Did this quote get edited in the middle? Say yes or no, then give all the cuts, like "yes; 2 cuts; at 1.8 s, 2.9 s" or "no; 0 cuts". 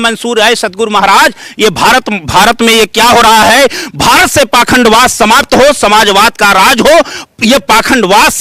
no; 0 cuts